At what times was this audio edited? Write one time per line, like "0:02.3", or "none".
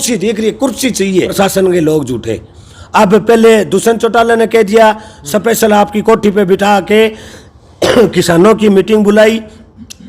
0:01.3